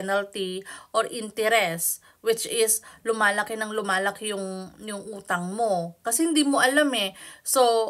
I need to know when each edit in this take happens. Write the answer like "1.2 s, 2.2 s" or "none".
none

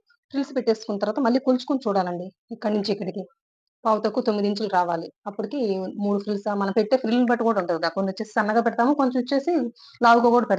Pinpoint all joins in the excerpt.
none

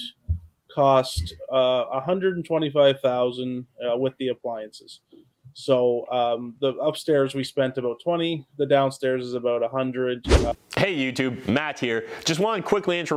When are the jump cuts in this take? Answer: none

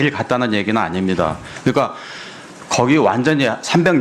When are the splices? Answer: none

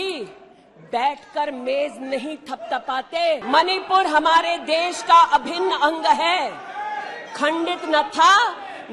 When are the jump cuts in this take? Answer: 3.4 s

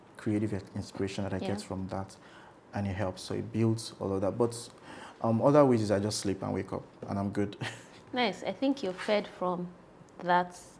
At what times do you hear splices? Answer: none

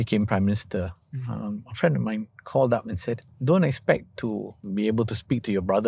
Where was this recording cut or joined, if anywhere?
3.3 s, 4.6 s

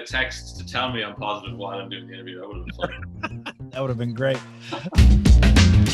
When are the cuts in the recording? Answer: 5.0 s

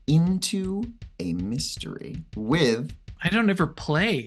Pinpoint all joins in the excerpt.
3.2 s

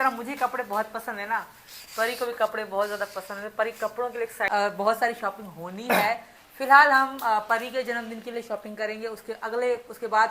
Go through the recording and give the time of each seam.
4.5 s

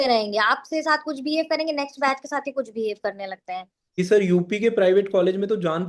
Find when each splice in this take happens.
3.8 s

